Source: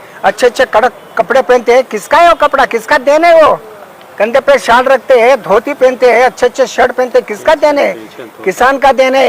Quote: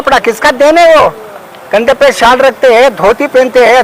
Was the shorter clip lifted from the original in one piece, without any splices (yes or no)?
yes